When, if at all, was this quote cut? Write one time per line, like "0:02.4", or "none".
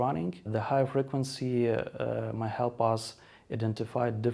none